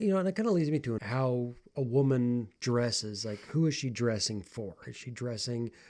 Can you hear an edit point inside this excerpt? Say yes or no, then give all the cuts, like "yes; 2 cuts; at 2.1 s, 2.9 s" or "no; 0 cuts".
yes; 1 cut; at 1.0 s